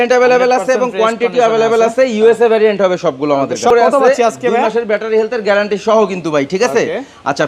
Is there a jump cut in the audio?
yes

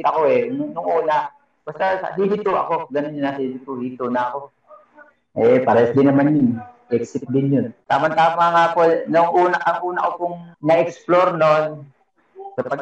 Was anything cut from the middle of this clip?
yes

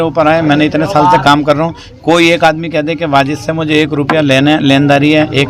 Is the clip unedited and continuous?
yes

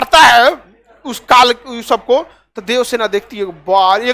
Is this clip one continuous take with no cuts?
yes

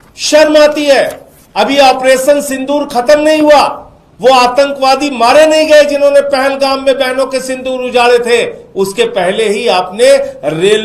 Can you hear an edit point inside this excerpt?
no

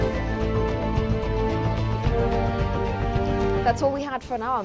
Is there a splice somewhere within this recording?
no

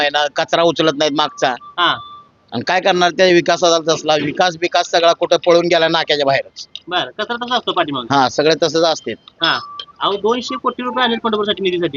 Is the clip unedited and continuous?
yes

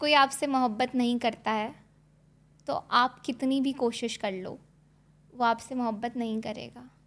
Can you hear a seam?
no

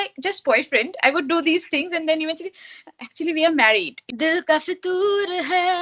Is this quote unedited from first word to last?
no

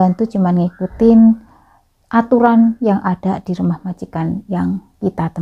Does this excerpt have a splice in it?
no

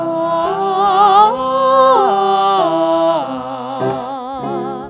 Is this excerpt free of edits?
yes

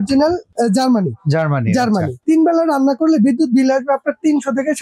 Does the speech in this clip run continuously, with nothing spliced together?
no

